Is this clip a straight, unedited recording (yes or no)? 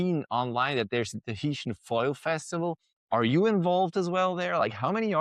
yes